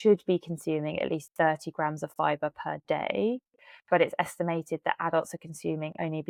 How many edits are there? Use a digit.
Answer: 0